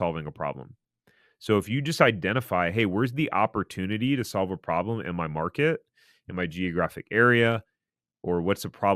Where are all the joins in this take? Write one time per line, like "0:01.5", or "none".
none